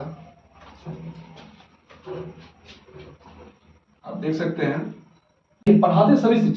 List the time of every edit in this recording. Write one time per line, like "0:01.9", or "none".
0:05.7